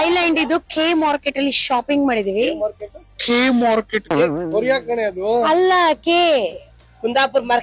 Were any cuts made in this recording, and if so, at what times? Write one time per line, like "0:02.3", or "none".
none